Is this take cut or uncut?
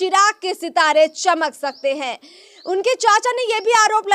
uncut